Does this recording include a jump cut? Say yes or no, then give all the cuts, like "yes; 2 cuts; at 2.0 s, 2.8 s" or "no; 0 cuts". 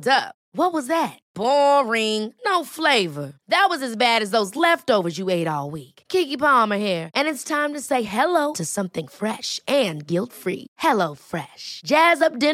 no; 0 cuts